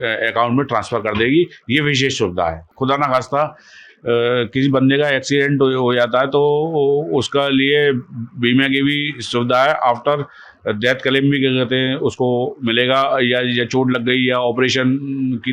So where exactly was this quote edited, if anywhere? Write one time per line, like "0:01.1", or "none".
0:02.7